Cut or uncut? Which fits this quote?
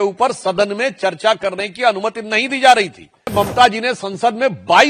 cut